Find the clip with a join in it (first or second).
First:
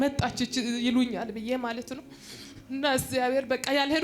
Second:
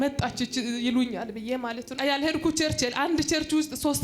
second